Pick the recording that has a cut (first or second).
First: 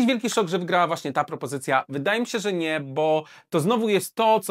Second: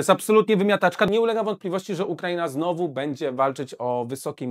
second